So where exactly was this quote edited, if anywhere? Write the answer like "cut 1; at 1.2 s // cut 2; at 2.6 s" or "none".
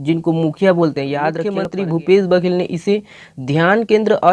cut 1; at 1.6 s